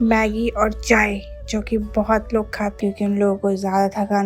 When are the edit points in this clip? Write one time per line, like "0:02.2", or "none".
0:02.7